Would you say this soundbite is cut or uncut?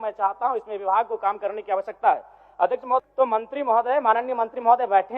cut